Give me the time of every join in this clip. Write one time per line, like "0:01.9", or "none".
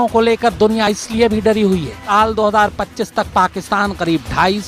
0:01.9

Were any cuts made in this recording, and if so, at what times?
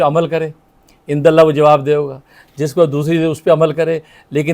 none

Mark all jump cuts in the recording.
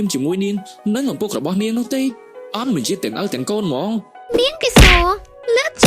0:04.2

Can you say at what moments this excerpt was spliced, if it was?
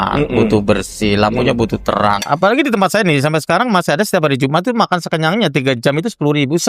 0:02.2

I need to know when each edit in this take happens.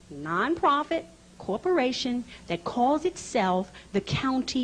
0:03.2

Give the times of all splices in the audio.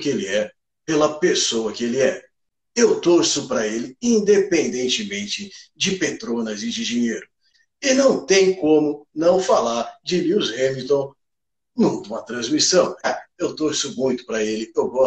0:07.5
0:13.1

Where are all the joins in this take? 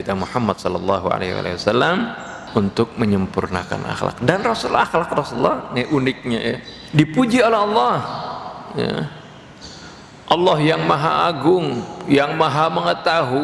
0:02.3
0:06.7

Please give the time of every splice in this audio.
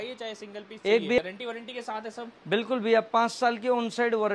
0:01.2

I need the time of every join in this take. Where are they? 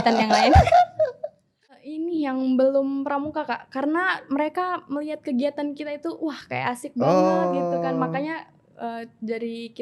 0:01.6

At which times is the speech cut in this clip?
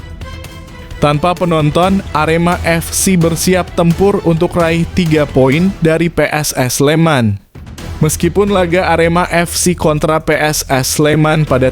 0:01.0

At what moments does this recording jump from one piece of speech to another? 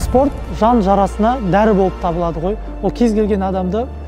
none

